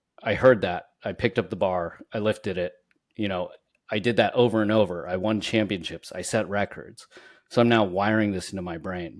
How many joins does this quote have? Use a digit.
0